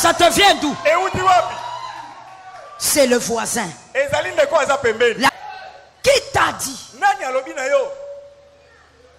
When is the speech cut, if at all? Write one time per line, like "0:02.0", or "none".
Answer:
0:05.4